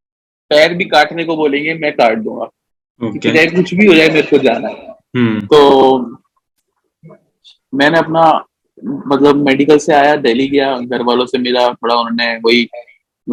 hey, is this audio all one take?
yes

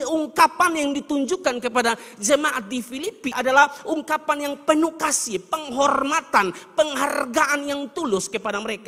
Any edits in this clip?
no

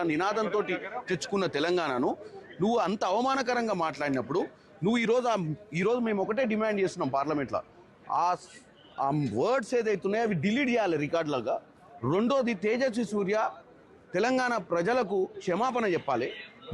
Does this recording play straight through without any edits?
no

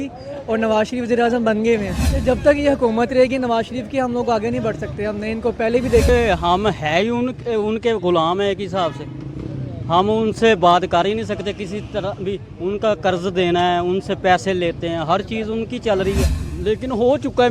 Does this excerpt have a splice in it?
yes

